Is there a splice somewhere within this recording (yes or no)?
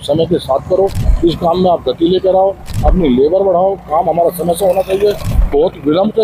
no